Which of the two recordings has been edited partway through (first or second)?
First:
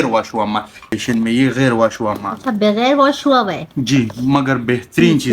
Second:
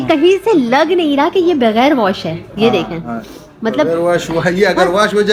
first